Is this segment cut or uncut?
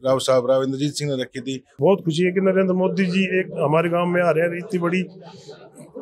cut